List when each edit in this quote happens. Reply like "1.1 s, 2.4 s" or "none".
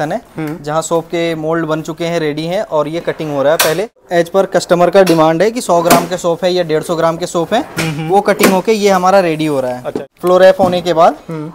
4.0 s, 10.0 s